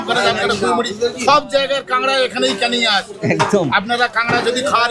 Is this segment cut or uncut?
uncut